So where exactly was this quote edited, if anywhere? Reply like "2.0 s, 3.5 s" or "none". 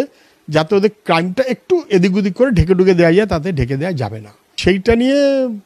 4.5 s